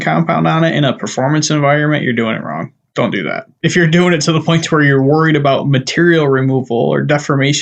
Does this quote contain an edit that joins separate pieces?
yes; 1 cut; at 3.5 s

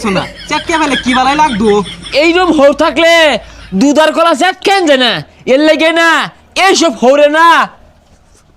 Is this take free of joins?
yes; 0 cuts

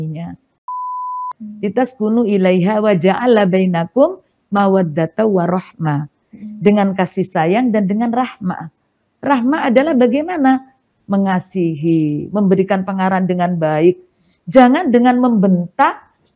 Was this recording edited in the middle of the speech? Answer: yes; 1 cut; at 0.9 s

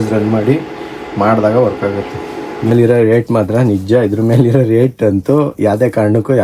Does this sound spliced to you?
yes; 1 cut; at 2.7 s

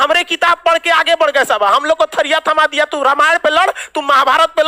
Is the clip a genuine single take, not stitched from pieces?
yes; 0 cuts

